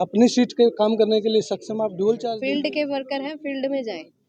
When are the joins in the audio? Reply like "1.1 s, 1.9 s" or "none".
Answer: 2.4 s